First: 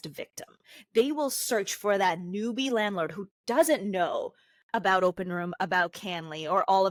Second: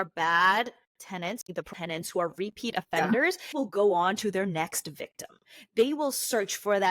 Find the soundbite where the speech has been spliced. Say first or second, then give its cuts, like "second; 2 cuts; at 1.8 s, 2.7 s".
second; 2 cuts; at 1.4 s, 3.5 s